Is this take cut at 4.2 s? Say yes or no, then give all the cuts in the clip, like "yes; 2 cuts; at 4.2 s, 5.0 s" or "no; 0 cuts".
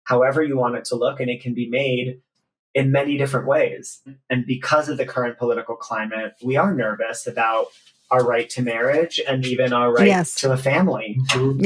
yes; 1 cut; at 4.2 s